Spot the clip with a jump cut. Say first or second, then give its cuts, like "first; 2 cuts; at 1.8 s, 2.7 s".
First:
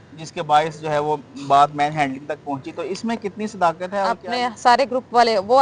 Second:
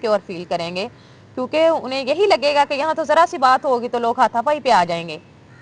first; 1 cut; at 4.1 s